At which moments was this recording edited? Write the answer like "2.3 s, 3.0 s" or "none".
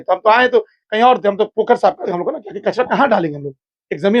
2.1 s